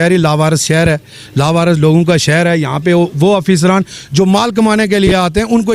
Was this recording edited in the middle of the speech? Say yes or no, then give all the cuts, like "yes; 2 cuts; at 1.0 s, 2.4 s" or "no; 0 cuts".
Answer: no; 0 cuts